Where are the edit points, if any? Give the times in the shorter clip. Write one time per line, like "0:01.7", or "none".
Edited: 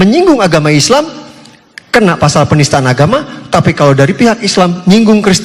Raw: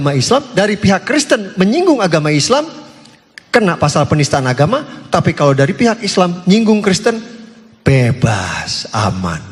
none